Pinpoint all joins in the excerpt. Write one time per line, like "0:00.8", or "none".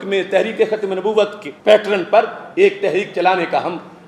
0:01.5